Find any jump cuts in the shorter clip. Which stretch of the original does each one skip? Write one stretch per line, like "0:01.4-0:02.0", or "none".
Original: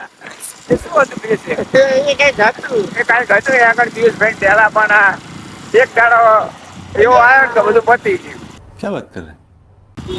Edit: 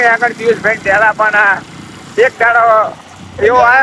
none